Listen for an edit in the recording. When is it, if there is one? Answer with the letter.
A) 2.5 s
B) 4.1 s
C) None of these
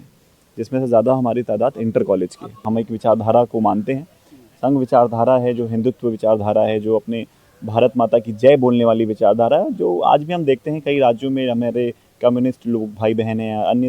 A